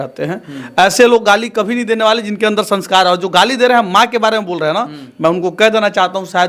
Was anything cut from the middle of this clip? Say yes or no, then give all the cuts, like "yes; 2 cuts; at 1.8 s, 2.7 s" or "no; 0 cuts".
no; 0 cuts